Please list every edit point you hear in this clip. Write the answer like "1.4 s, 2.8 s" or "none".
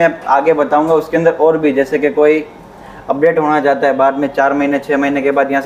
none